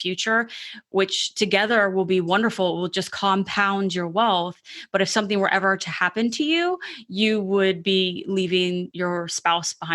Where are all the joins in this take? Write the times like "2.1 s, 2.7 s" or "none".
8.9 s